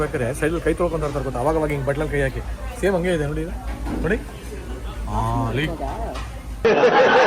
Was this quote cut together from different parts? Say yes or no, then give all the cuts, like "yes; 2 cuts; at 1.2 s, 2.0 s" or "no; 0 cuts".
no; 0 cuts